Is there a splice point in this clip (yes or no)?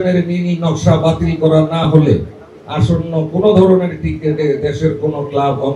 no